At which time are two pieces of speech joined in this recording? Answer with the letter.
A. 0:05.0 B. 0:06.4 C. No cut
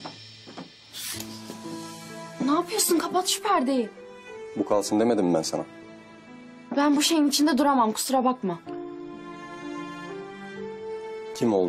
C